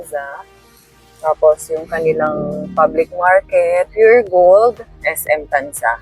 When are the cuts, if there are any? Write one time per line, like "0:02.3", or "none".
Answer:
0:03.9
0:05.1